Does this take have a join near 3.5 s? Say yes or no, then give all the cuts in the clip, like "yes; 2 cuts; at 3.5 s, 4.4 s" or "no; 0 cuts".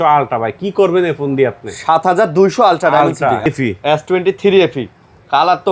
yes; 1 cut; at 3.5 s